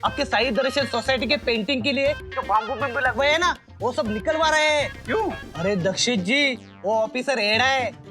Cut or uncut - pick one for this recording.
cut